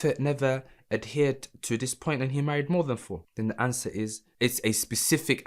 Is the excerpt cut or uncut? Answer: cut